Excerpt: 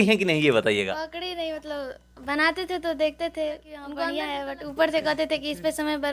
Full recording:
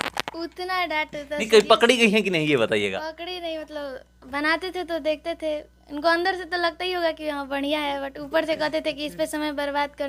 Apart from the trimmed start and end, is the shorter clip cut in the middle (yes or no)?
yes